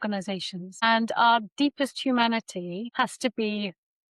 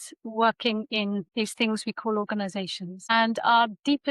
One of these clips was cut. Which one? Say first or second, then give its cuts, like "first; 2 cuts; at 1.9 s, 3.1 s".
second; 1 cut; at 1.3 s